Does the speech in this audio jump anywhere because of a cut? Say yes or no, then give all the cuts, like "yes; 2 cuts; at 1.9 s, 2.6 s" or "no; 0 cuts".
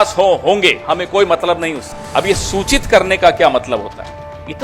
yes; 1 cut; at 1.9 s